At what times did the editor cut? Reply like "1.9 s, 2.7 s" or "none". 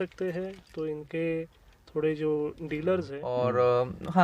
3.2 s